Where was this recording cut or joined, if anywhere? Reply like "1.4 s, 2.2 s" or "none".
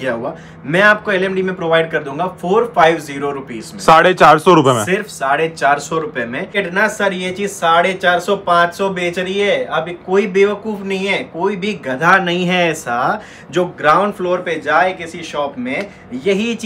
6.6 s